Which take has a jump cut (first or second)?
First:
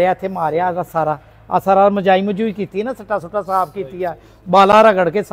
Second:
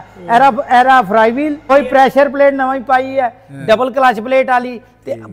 second